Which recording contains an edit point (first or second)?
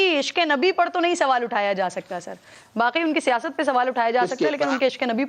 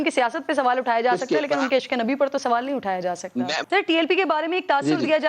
second